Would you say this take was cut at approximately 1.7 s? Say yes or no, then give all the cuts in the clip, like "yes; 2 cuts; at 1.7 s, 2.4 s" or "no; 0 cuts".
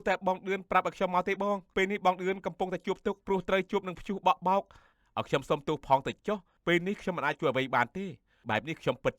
yes; 5 cuts; at 1.7 s, 3.2 s, 4.8 s, 6.5 s, 8.4 s